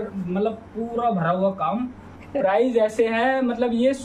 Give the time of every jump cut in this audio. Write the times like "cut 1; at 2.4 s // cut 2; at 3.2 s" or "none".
cut 1; at 2.2 s